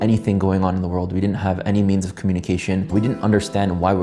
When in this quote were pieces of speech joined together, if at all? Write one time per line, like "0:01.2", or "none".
0:02.9